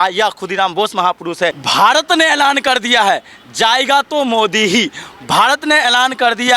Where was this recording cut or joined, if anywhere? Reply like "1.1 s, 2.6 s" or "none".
1.6 s